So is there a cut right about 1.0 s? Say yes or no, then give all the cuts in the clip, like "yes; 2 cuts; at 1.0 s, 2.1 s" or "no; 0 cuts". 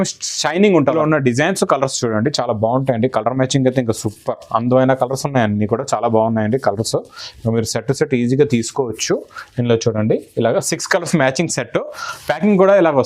yes; 1 cut; at 1.0 s